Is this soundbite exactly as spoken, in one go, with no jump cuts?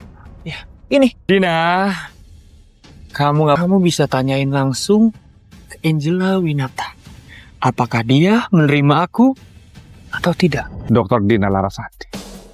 no; 3 cuts; at 1.2 s, 3.6 s, 10.7 s

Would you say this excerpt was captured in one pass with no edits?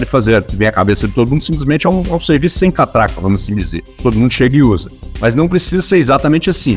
yes; 0 cuts

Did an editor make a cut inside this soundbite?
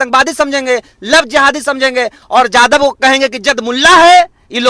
no; 0 cuts

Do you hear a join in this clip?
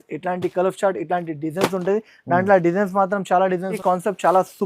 yes; 1 cut; at 3.8 s

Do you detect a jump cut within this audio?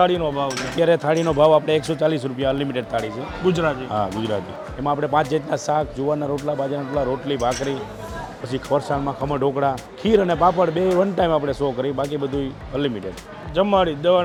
no; 0 cuts

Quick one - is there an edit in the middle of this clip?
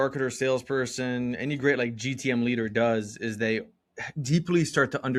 no; 0 cuts

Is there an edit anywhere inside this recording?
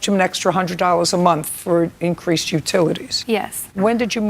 yes; 1 cut; at 3.4 s

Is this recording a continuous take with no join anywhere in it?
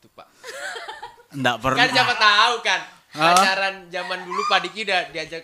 yes; 0 cuts

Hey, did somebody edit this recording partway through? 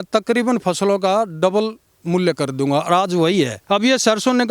yes; 1 cut; at 3.6 s

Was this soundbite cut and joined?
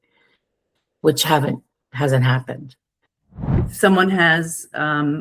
yes; 1 cut; at 3.4 s

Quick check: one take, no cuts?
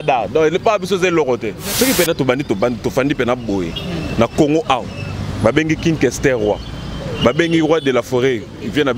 no; 1 cut; at 1.6 s

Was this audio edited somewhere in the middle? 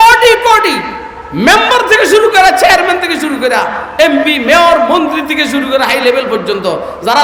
no; 0 cuts

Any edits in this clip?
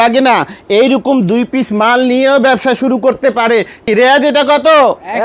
yes; 1 cut; at 3.8 s

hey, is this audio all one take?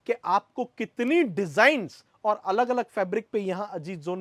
yes; 0 cuts

